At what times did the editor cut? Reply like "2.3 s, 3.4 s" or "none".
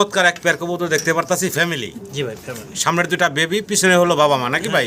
none